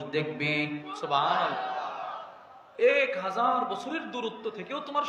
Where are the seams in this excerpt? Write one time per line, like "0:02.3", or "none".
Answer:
none

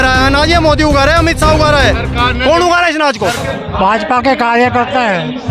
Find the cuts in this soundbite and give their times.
0:03.4

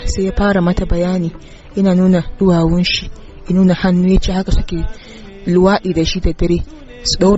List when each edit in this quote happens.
none

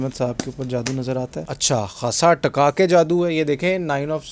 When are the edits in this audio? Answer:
0:01.5

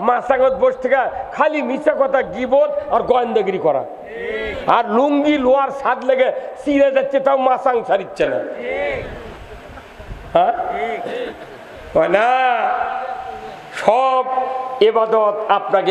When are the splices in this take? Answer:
none

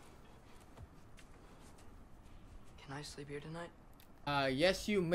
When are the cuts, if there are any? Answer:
none

